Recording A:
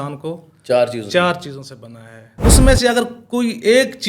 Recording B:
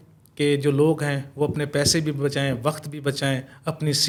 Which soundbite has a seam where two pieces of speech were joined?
A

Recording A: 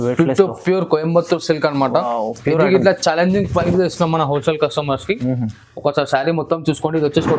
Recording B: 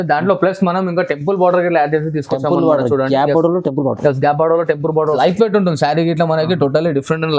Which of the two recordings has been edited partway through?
B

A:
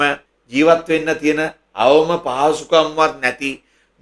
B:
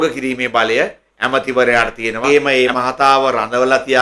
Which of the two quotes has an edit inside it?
B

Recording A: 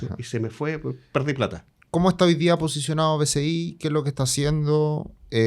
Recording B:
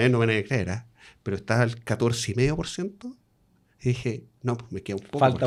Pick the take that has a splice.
A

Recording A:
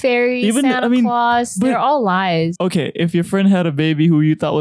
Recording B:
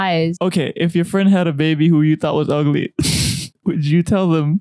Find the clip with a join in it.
B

